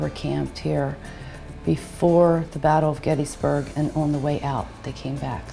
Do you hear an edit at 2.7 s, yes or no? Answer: no